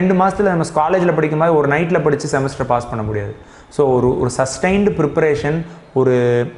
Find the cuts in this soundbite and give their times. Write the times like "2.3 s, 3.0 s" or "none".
none

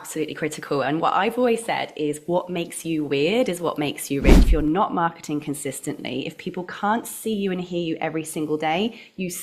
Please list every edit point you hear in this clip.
4.4 s

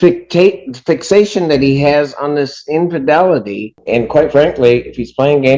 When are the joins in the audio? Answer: 3.7 s

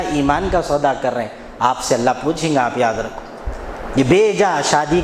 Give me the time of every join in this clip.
none

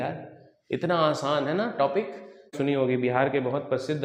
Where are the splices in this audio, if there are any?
2.5 s

